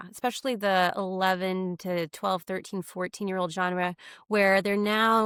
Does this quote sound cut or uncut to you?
uncut